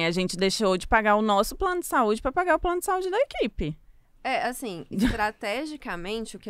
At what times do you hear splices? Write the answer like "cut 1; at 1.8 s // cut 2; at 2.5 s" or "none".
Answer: none